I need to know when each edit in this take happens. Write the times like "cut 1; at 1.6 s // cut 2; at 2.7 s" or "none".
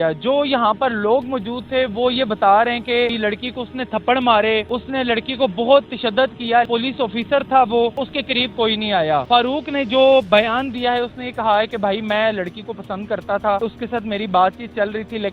cut 1; at 3.1 s // cut 2; at 4.7 s // cut 3; at 6.7 s // cut 4; at 8.1 s // cut 5; at 9.2 s // cut 6; at 13.6 s